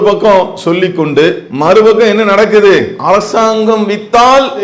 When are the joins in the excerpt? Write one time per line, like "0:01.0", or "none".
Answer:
0:01.5
0:02.9